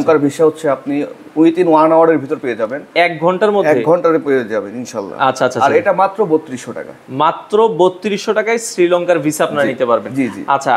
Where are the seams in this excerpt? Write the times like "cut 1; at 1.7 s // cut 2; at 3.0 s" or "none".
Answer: none